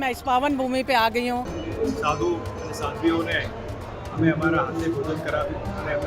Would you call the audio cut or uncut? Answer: cut